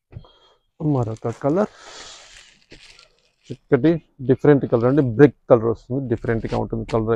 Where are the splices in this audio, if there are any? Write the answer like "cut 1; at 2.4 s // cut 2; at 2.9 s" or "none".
none